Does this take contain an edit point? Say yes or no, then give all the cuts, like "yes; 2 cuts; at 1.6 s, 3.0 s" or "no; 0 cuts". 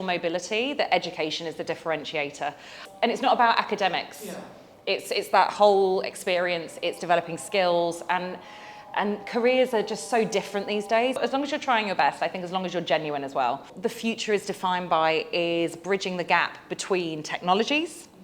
yes; 3 cuts; at 2.8 s, 11.2 s, 13.7 s